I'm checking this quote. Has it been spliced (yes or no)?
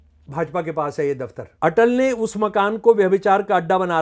yes